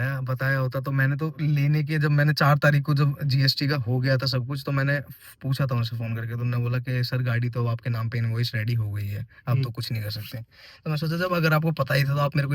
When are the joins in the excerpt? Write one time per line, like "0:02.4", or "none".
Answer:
none